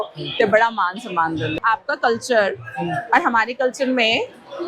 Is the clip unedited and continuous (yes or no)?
no